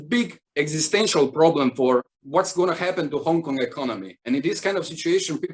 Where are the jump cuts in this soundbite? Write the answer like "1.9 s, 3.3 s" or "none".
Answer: none